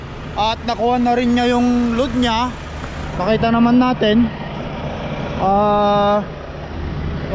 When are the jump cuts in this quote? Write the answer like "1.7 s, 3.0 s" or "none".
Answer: none